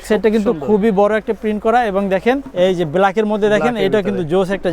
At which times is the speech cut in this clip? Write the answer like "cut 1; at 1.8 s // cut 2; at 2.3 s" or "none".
cut 1; at 2.5 s

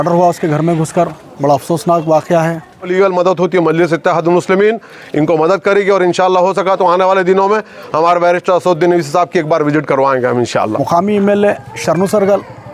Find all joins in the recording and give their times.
cut 1; at 2.9 s // cut 2; at 10.8 s

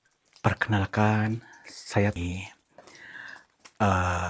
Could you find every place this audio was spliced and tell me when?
cut 1; at 2.1 s

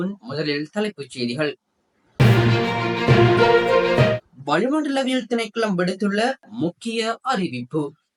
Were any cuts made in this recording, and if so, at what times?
none

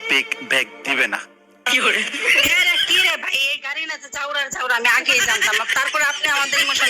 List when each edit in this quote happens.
none

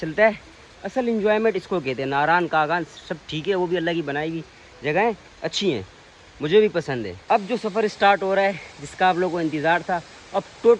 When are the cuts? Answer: cut 1; at 7.1 s

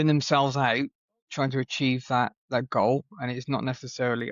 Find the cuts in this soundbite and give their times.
none

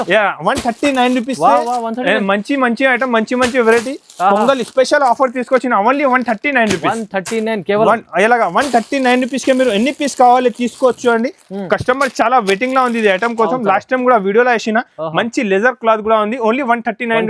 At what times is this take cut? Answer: none

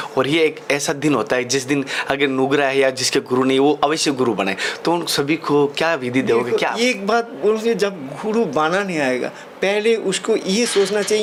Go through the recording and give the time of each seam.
none

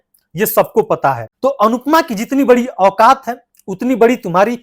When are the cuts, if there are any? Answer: cut 1; at 1.1 s

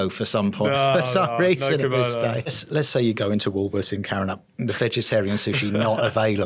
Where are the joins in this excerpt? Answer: cut 1; at 2.6 s

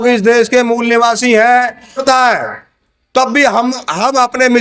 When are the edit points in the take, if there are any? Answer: cut 1; at 2.0 s

